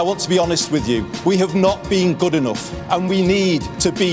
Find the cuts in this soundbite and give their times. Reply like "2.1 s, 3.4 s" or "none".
none